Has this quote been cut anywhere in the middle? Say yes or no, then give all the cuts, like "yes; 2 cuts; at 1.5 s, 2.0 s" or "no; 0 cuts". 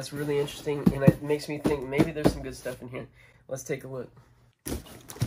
no; 0 cuts